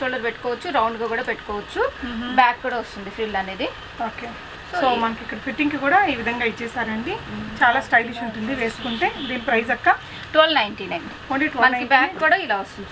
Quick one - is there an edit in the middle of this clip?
no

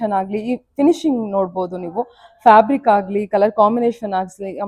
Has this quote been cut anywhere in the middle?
no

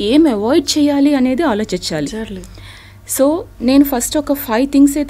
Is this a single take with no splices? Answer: yes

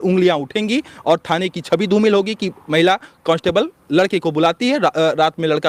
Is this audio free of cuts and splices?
yes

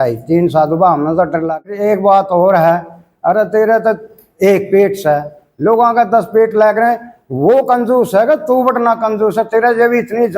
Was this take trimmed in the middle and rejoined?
yes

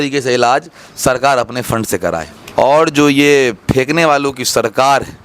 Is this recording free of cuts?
no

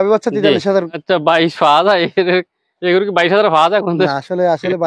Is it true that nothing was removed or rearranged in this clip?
no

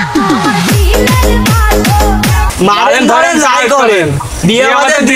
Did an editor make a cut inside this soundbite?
yes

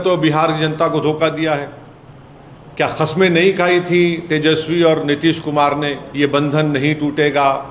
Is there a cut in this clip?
no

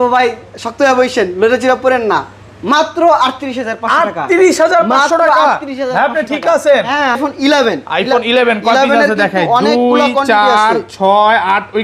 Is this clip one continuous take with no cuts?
no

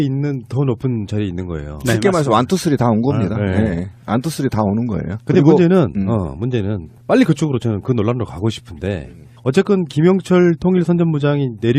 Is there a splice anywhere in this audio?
no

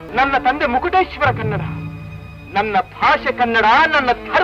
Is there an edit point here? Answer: no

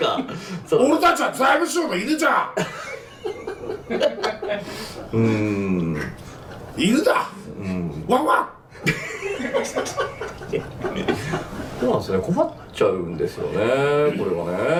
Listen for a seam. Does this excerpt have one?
no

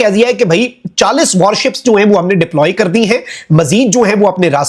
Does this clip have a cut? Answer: no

